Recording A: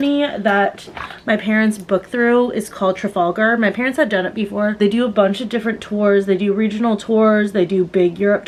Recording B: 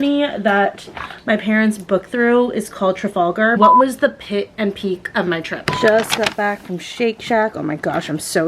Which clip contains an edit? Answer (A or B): B